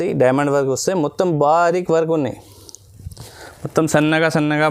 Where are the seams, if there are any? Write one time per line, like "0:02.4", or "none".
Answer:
none